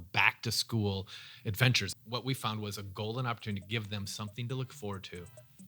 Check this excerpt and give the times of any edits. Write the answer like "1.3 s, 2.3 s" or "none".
1.9 s